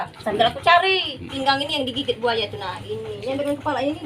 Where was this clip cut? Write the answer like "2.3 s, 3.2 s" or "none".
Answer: 1.3 s

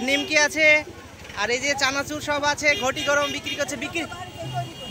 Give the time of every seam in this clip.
none

